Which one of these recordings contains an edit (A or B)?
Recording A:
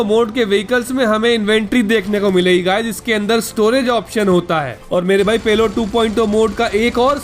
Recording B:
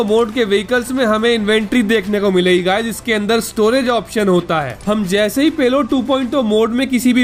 A